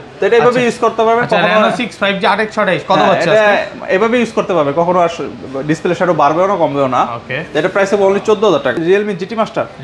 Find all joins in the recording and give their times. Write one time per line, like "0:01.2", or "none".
0:08.8